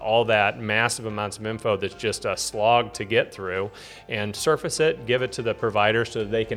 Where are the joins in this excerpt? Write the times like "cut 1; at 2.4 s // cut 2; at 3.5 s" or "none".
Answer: none